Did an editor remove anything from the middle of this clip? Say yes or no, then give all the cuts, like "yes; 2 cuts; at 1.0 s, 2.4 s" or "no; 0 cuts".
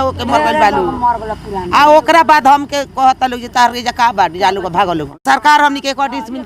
yes; 1 cut; at 5.2 s